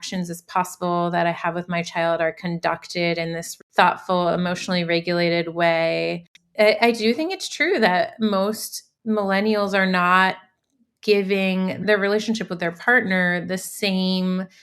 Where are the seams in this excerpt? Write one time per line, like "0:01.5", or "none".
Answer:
0:03.5
0:06.3
0:11.8